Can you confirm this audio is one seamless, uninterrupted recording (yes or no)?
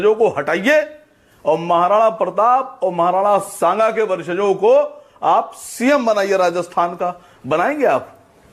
yes